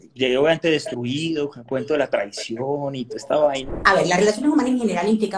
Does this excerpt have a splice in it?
yes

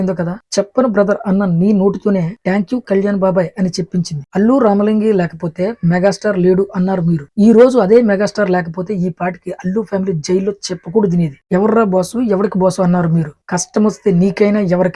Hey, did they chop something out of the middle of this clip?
yes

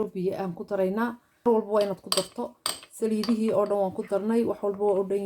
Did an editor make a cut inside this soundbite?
yes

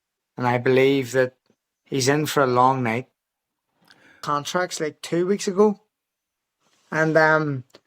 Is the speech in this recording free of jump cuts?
no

